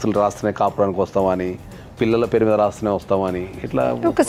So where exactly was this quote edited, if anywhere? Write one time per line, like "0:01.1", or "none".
none